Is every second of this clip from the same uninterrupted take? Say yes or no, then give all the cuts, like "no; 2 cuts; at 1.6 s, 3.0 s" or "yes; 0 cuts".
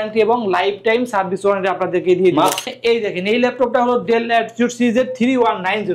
no; 1 cut; at 2.7 s